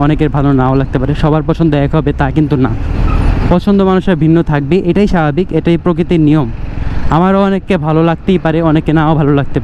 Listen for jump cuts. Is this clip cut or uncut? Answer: uncut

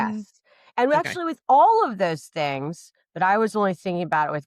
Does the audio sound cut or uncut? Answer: uncut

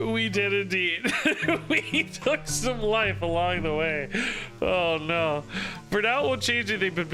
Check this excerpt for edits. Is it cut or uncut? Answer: uncut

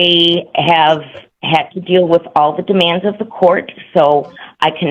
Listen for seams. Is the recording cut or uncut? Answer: uncut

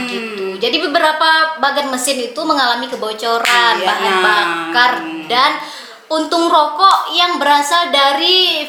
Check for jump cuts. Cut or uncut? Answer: uncut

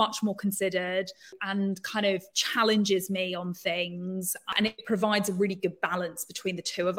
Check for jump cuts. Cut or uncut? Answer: cut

